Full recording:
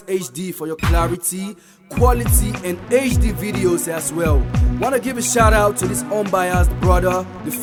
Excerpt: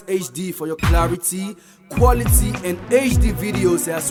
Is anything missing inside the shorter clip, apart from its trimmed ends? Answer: no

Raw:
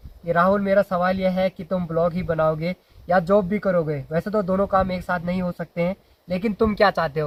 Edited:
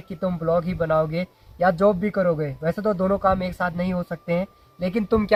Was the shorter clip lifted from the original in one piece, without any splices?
yes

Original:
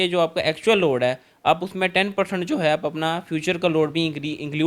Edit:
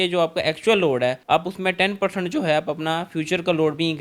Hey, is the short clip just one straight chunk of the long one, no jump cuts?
no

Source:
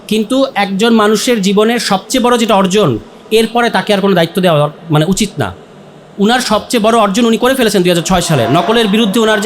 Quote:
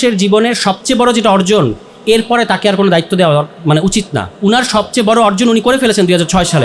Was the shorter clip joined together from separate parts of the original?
yes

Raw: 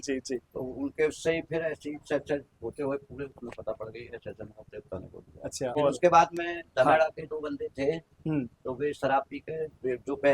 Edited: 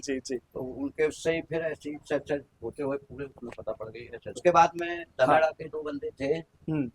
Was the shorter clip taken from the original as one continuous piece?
no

